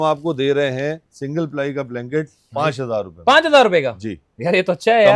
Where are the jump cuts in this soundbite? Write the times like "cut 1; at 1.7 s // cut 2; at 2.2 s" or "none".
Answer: none